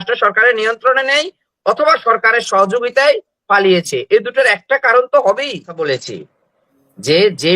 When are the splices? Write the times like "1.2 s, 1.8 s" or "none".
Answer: 5.7 s